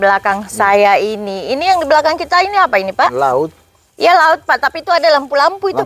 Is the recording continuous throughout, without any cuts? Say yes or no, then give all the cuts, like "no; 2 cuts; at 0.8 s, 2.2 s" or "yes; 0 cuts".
yes; 0 cuts